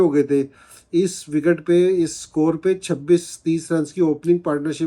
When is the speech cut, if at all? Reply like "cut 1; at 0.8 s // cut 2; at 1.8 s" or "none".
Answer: none